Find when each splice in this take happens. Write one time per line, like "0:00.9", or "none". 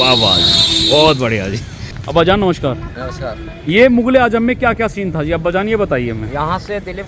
0:01.9